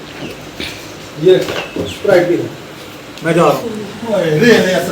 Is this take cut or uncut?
cut